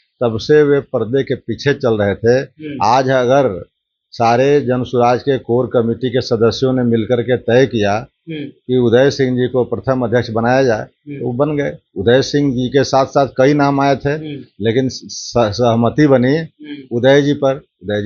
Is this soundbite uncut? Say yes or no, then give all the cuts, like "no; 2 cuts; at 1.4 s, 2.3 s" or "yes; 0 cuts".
yes; 0 cuts